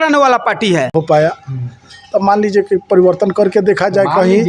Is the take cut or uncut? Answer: cut